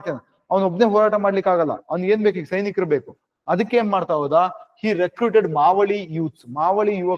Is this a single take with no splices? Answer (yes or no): yes